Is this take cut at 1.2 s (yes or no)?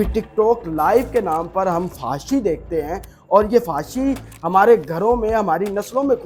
no